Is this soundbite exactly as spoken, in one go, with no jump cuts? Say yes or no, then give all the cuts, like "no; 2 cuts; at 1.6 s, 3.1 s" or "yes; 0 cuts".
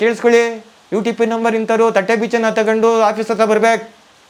yes; 0 cuts